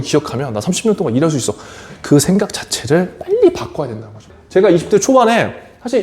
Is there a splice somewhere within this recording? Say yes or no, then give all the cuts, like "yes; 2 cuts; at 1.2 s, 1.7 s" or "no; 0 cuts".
yes; 1 cut; at 4.4 s